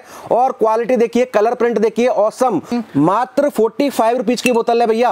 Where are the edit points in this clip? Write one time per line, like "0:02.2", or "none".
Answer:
0:02.7